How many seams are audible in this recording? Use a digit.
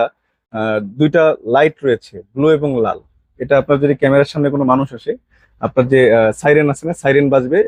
0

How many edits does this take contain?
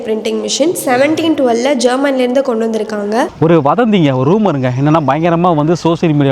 1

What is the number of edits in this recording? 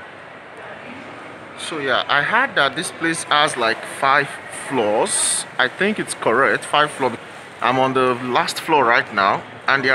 1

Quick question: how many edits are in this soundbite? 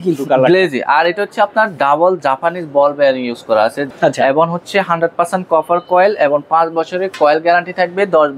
1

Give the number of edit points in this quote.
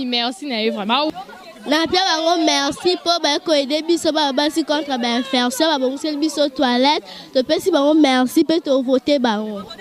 1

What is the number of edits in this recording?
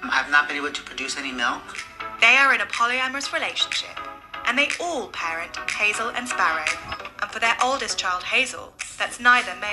2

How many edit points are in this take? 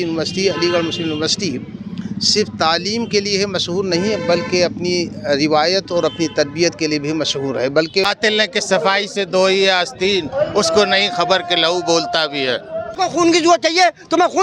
2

